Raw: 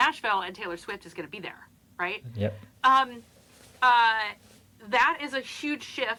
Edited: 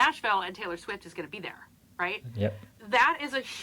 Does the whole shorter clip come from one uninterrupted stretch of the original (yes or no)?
no